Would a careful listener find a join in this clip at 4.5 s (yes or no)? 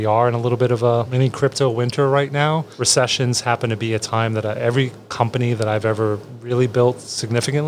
no